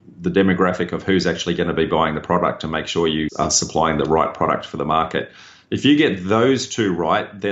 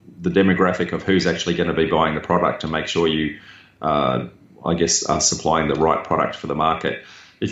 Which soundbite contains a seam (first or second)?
first